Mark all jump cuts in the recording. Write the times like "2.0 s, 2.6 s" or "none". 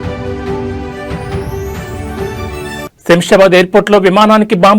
2.8 s

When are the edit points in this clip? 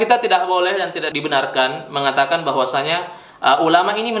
1.1 s

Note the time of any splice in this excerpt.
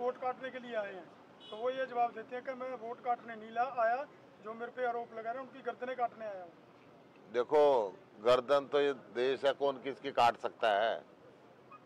none

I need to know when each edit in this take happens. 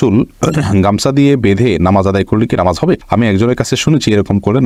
none

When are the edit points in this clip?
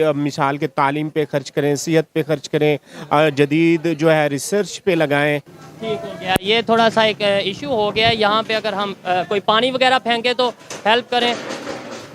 5.6 s

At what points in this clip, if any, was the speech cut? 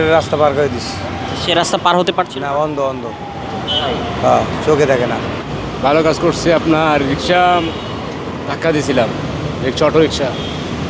1.3 s, 5.4 s

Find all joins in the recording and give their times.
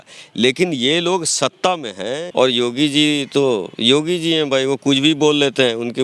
2.2 s

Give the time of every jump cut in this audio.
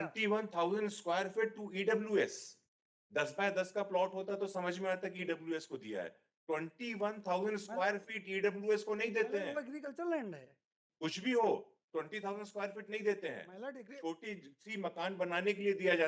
none

